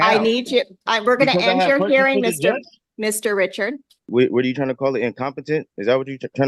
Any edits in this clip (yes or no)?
yes